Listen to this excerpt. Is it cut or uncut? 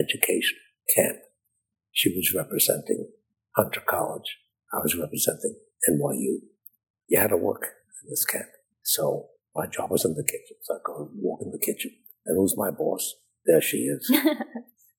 uncut